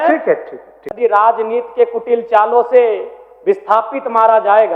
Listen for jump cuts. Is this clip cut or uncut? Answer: cut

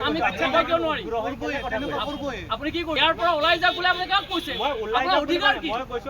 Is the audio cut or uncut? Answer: cut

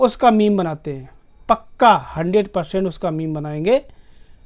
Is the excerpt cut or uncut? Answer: uncut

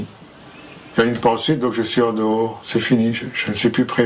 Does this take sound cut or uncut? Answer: uncut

